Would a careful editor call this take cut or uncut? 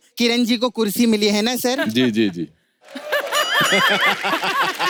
uncut